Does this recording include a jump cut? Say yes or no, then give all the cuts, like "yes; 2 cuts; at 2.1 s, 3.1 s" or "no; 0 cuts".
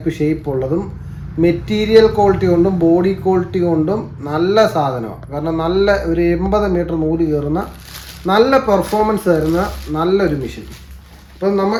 no; 0 cuts